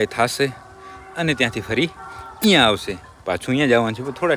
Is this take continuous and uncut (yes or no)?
yes